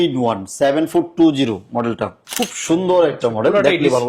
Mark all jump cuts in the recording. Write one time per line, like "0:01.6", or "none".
none